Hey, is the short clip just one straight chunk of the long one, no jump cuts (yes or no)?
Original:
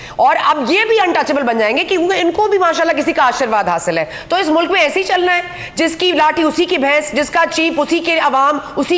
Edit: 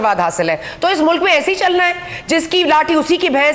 yes